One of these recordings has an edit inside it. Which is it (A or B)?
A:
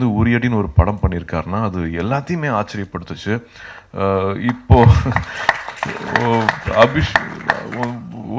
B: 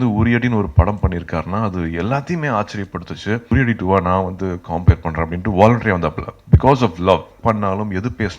B